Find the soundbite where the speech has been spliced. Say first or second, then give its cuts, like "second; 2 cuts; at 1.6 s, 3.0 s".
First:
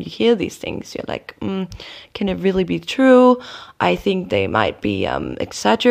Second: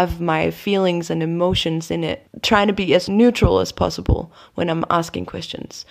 second; 1 cut; at 2.3 s